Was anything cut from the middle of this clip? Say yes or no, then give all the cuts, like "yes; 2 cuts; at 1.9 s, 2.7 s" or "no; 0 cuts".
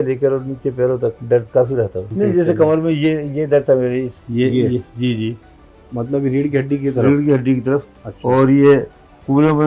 yes; 3 cuts; at 1.2 s, 2.0 s, 4.2 s